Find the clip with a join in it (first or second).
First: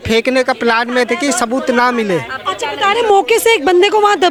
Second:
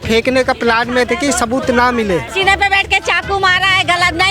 second